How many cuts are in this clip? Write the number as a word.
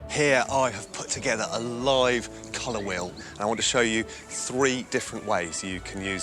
one